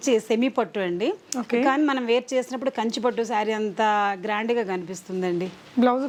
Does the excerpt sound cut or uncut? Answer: uncut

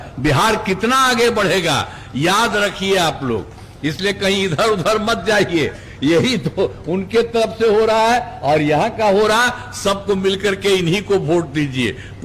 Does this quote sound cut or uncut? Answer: uncut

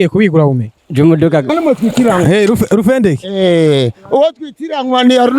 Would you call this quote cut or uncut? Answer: cut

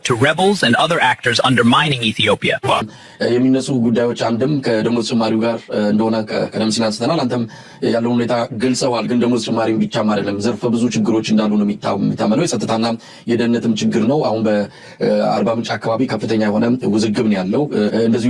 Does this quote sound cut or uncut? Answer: cut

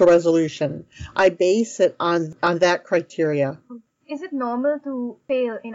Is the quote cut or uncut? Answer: cut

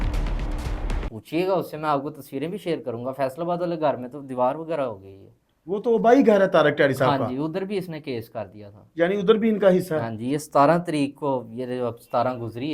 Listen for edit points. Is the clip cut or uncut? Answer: uncut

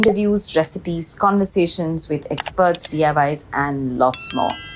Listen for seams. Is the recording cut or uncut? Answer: uncut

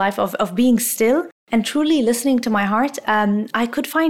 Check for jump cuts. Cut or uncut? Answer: cut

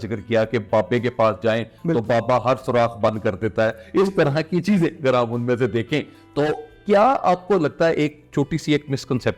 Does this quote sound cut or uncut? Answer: uncut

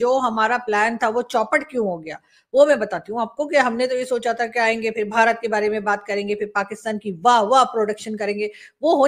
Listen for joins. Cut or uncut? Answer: uncut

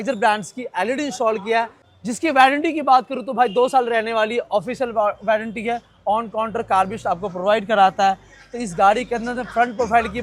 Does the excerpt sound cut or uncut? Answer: uncut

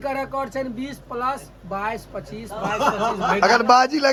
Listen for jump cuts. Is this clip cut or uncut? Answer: uncut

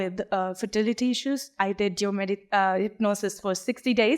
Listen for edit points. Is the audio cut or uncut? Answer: cut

